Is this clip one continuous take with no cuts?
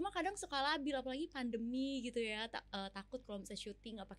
yes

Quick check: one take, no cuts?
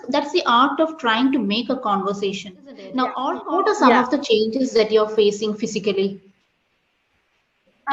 no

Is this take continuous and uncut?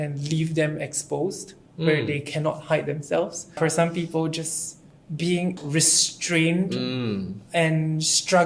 no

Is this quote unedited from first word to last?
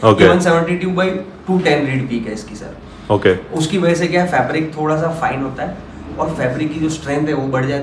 yes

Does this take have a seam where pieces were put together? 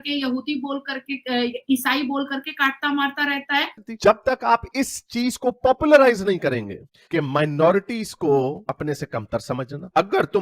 yes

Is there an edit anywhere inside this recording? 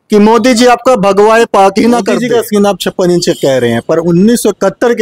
yes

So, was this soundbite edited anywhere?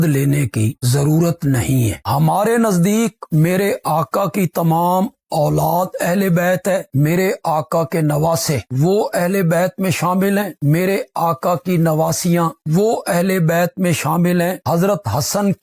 yes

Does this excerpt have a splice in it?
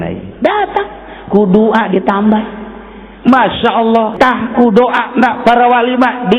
yes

